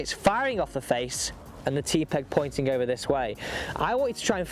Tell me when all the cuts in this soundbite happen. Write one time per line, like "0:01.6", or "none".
0:01.5